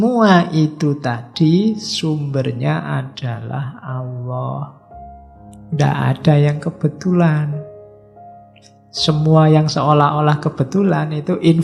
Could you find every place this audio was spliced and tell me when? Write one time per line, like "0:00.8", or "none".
none